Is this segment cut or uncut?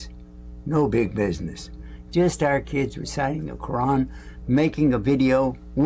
uncut